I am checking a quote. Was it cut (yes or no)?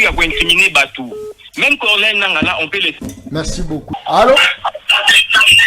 yes